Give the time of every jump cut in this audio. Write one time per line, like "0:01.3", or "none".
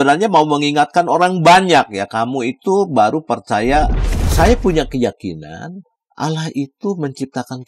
0:04.1